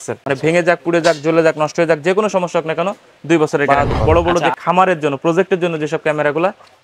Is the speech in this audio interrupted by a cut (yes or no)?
yes